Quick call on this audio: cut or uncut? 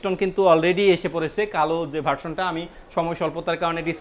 uncut